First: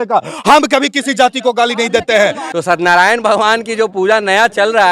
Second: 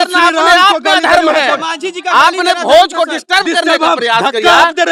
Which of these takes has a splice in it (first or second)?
first